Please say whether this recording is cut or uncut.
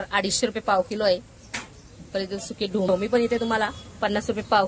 cut